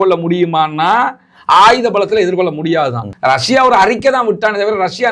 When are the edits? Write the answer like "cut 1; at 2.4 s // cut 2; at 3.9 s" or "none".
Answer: cut 1; at 3.1 s